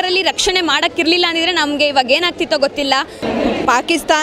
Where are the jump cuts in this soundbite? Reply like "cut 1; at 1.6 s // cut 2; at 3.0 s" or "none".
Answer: cut 1; at 3.2 s